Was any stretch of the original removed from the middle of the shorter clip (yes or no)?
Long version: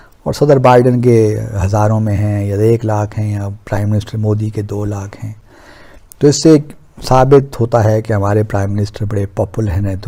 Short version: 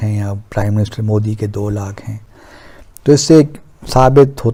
no